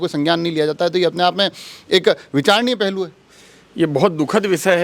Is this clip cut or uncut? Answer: uncut